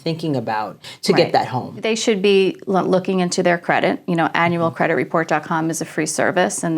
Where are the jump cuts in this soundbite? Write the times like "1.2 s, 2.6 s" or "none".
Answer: 0.9 s, 1.8 s